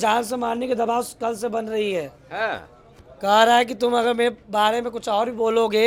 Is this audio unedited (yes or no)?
yes